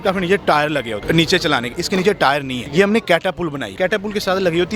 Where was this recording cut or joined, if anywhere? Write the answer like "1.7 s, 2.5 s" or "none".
1.0 s, 2.6 s, 3.7 s